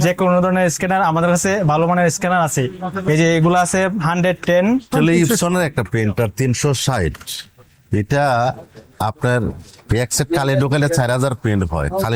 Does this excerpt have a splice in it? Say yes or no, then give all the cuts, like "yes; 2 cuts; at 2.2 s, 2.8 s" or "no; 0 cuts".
yes; 1 cut; at 4.9 s